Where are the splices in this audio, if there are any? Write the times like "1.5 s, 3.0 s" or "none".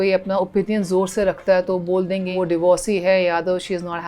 2.3 s